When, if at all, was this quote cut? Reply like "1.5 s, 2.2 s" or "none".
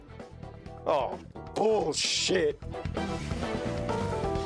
none